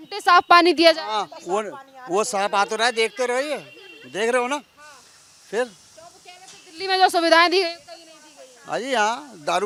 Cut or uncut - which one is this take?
uncut